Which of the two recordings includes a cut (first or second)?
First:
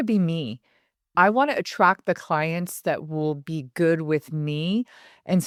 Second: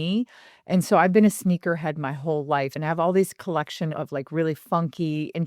second